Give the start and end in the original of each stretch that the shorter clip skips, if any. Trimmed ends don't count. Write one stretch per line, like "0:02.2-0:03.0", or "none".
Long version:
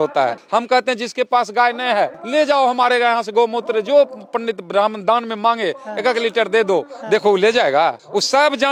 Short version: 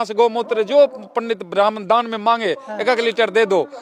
none